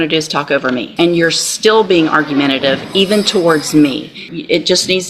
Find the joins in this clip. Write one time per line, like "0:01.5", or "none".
0:00.9
0:04.3